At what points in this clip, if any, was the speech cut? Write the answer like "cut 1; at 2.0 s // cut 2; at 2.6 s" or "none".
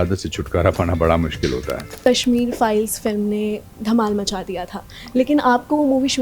cut 1; at 1.9 s